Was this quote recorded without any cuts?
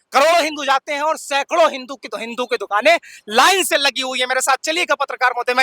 yes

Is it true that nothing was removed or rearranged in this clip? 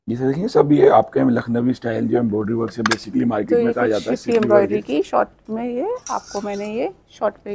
yes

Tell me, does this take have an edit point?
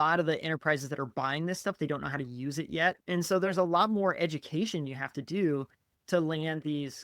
yes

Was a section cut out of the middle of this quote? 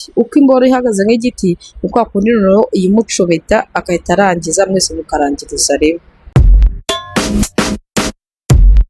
yes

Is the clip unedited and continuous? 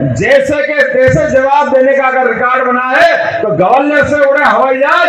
yes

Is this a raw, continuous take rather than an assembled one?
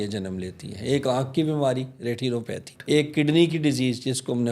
no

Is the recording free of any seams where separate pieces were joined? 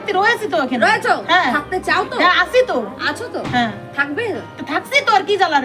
yes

